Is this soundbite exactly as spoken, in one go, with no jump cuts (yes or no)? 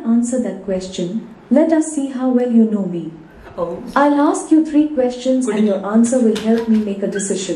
yes